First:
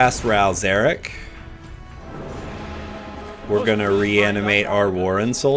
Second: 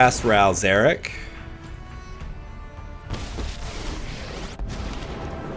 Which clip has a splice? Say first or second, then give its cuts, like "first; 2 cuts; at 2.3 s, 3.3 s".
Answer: first; 1 cut; at 2.0 s